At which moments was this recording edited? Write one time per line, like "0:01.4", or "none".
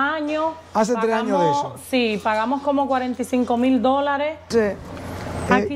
0:04.5